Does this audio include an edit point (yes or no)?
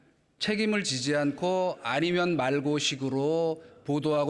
no